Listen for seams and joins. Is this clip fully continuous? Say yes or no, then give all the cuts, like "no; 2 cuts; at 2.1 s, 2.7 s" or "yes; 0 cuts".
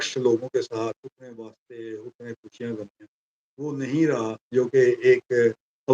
yes; 0 cuts